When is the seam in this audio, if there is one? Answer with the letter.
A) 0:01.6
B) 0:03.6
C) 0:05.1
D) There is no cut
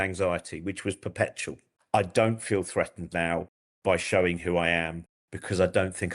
A